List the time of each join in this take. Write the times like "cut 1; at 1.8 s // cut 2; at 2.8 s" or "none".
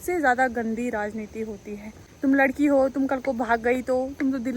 cut 1; at 2.0 s